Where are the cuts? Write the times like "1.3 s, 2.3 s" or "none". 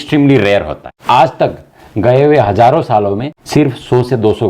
0.9 s, 3.3 s